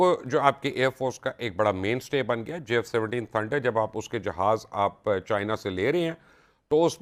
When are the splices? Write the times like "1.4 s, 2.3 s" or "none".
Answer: none